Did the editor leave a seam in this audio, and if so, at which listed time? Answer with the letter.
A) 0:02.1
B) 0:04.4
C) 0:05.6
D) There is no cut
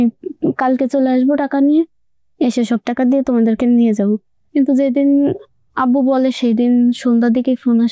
D